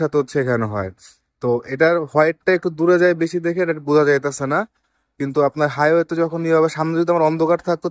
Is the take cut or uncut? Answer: uncut